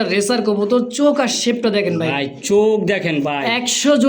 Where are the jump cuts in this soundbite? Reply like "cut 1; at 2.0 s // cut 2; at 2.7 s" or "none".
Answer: none